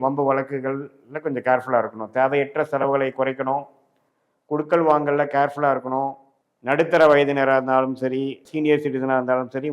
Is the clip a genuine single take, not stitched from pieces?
no; 2 cuts; at 6.3 s, 8.5 s

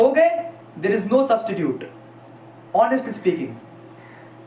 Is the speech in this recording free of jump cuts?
yes; 0 cuts

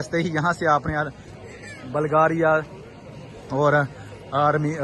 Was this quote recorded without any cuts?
yes; 0 cuts

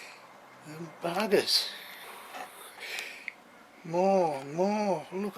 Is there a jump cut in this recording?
yes; 1 cut; at 2.0 s

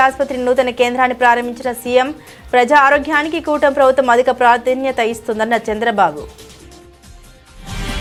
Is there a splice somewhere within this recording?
no; 0 cuts

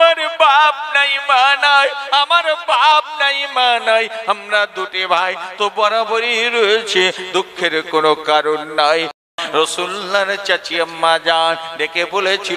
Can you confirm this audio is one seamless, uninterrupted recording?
no; 1 cut; at 9.4 s

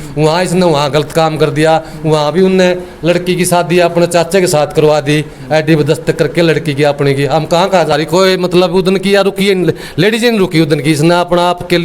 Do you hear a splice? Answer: yes; 1 cut; at 7.9 s

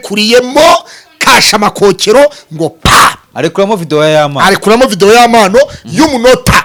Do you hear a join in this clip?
no; 0 cuts

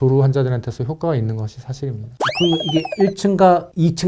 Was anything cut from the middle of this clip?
no; 0 cuts

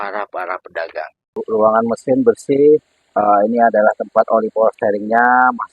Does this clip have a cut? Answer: yes; 1 cut; at 1.2 s

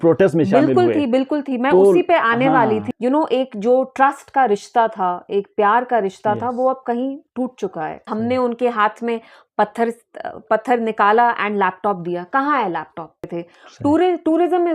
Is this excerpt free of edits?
no; 3 cuts; at 2.9 s, 8.1 s, 13.3 s

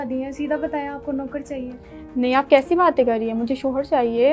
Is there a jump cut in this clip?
no; 0 cuts

